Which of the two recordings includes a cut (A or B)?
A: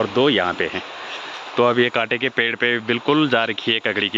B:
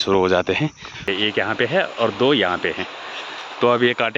B